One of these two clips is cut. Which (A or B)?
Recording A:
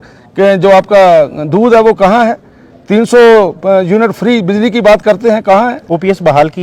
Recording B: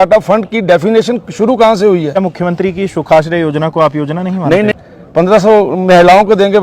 B